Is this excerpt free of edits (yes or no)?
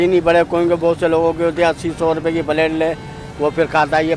yes